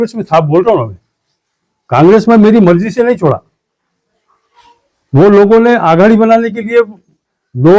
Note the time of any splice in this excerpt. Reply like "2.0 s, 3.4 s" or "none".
none